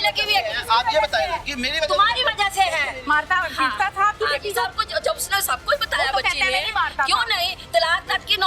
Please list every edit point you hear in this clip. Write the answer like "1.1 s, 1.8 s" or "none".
3.0 s